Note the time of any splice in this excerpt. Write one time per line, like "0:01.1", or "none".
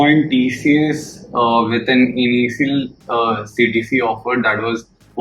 none